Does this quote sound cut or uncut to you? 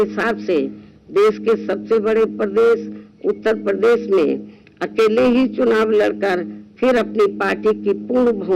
uncut